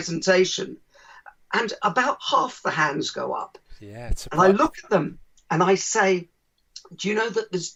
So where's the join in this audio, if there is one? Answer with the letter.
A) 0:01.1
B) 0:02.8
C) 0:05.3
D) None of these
D